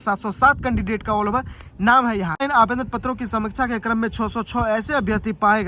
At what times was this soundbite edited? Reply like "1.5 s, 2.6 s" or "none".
2.4 s